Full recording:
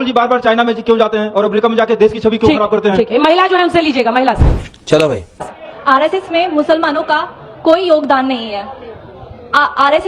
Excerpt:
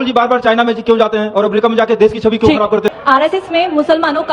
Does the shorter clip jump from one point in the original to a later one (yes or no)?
yes